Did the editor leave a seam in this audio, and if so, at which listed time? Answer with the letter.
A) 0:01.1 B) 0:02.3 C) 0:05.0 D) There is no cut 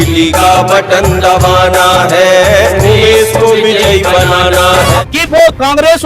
C